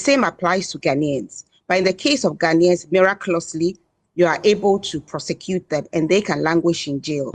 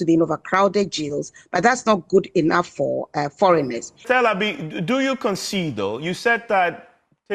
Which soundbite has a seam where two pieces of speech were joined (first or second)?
second